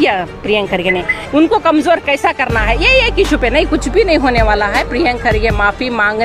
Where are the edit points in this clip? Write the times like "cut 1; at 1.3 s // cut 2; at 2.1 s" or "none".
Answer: cut 1; at 1.1 s